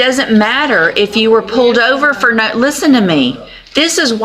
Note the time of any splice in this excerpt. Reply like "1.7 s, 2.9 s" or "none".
none